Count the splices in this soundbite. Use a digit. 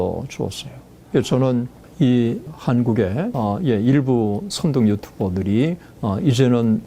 4